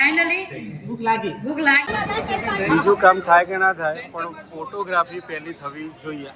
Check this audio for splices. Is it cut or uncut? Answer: cut